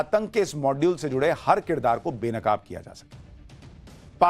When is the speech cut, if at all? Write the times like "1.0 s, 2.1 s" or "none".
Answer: 1.9 s

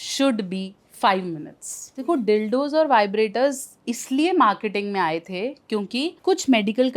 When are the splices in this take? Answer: 2.2 s, 6.2 s

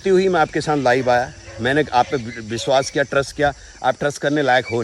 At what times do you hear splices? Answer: none

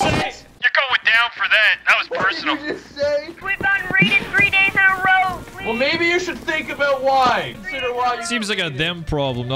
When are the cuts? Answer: 3.4 s, 7.7 s

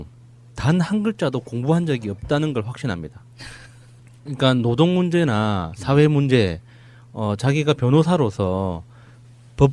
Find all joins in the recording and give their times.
1.9 s

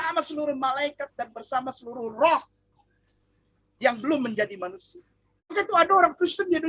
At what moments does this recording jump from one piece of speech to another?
5.5 s

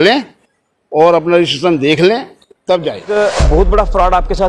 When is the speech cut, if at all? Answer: 3.1 s

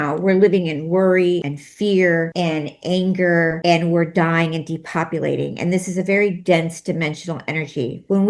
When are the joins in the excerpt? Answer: 1.6 s, 2.3 s, 3.6 s

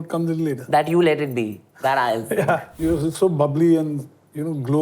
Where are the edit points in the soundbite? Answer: 2.7 s

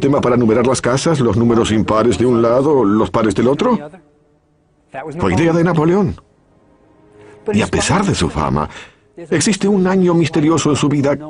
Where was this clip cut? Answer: 8.5 s

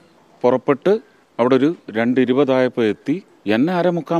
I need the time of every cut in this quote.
1.2 s, 3.3 s

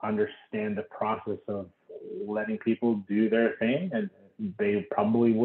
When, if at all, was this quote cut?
none

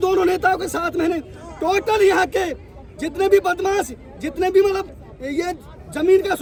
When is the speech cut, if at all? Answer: none

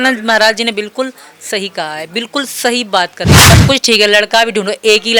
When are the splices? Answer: 3.4 s

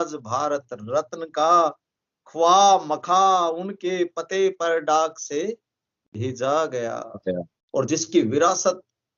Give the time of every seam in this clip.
7.5 s

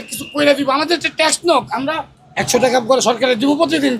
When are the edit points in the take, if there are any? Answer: 2.2 s

